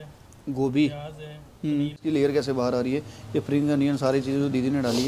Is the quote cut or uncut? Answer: cut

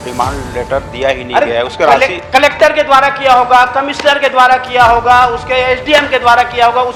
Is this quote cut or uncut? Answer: uncut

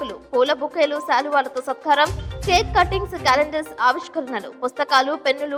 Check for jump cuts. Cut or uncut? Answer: uncut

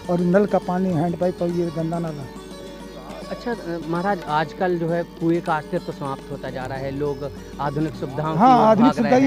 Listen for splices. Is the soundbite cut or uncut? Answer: uncut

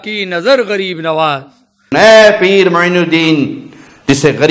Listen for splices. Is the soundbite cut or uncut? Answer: cut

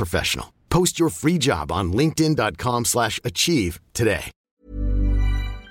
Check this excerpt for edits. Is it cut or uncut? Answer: cut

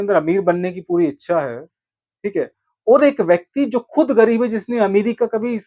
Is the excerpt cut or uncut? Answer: uncut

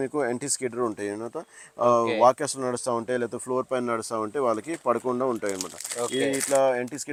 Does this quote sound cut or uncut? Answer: uncut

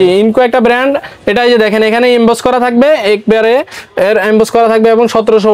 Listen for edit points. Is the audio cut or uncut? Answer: uncut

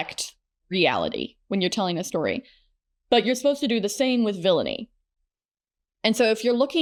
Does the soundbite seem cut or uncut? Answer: uncut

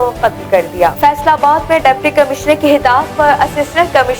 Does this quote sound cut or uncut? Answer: cut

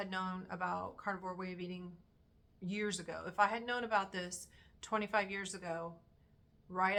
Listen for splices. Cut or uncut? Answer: uncut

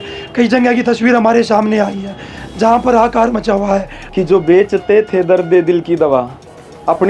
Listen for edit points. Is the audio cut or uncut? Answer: cut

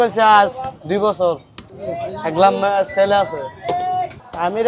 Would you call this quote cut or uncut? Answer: uncut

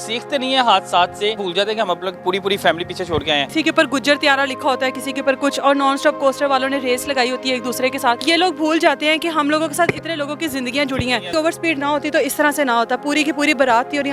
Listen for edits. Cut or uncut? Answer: cut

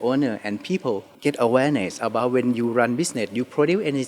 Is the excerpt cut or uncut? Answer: cut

